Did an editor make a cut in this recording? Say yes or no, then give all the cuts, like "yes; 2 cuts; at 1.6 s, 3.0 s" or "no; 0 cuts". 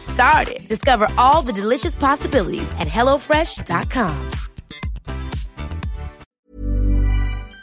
yes; 1 cut; at 6.3 s